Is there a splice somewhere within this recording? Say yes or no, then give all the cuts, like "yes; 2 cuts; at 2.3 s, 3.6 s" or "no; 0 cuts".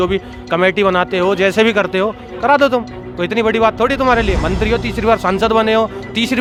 no; 0 cuts